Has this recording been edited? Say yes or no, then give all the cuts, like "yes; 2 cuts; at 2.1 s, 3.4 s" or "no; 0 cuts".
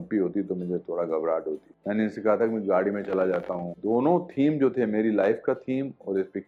yes; 2 cuts; at 1.7 s, 3.6 s